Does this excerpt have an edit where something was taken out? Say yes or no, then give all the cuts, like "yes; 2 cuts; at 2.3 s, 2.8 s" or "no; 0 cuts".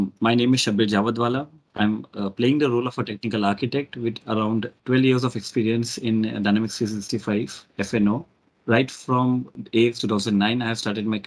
yes; 2 cuts; at 4.7 s, 9.5 s